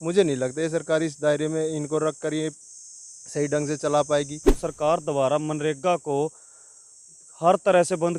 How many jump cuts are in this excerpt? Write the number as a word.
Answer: one